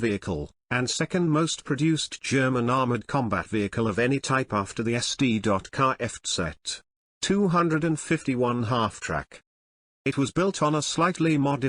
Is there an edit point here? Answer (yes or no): yes